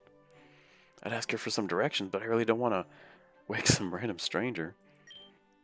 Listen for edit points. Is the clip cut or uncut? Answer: uncut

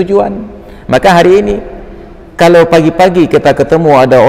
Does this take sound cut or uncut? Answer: uncut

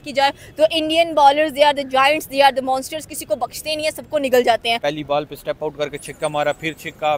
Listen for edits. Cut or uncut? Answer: cut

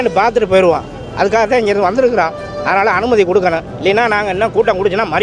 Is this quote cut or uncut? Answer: uncut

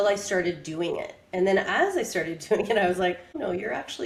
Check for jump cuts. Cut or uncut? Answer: uncut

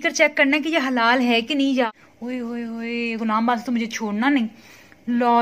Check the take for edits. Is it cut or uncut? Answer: cut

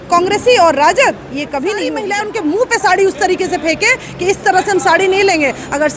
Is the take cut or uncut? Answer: cut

